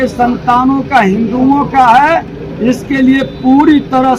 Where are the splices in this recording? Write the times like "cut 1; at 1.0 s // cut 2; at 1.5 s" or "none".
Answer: none